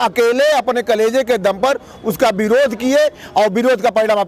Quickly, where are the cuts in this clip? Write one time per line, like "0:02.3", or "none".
none